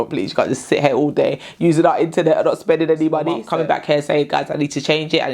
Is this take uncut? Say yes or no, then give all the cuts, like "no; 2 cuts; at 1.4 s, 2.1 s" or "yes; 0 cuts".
no; 1 cut; at 3.4 s